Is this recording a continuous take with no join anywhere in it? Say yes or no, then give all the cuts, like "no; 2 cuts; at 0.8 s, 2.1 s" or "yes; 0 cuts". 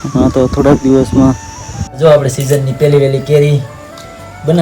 no; 1 cut; at 2.0 s